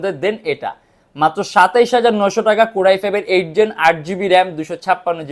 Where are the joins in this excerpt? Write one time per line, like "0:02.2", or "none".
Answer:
none